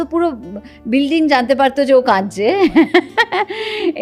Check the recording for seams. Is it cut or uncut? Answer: uncut